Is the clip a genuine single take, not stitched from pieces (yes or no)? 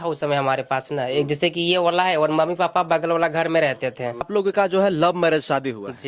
no